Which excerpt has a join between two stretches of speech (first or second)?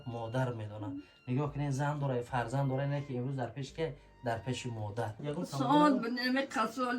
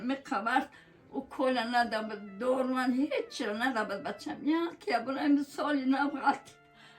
first